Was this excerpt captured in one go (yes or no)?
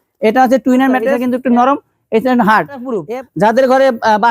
no